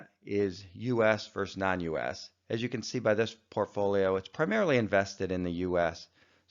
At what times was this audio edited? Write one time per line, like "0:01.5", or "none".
0:01.1